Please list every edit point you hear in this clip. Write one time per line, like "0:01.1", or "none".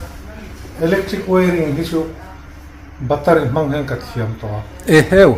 none